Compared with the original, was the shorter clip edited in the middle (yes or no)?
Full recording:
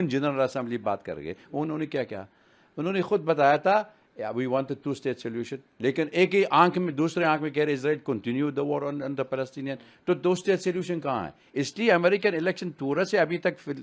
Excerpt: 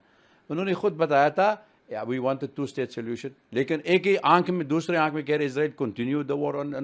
no